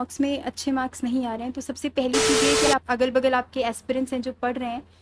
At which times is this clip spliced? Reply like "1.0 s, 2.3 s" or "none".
2.7 s